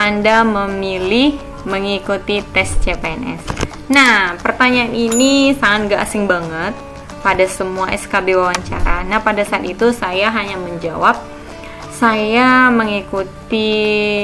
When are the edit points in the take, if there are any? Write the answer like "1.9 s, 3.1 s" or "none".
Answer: 1.5 s